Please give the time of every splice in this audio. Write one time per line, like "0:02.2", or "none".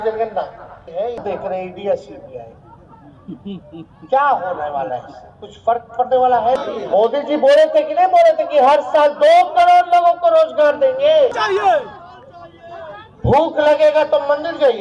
0:01.2
0:06.6
0:11.4

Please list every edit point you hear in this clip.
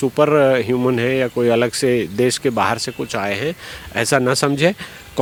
none

